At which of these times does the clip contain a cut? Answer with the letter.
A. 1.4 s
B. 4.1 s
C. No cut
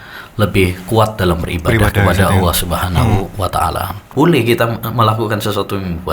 B